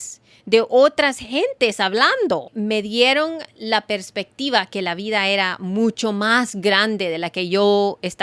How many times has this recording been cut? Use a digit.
0